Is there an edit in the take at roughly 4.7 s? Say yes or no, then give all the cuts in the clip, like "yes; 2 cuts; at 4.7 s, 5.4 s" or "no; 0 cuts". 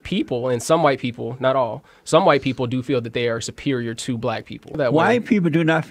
yes; 1 cut; at 4.7 s